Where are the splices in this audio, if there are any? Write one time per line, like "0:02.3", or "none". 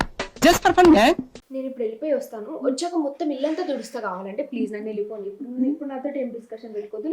0:01.4